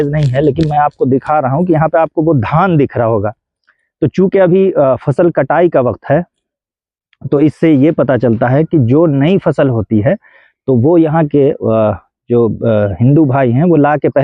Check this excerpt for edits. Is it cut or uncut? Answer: uncut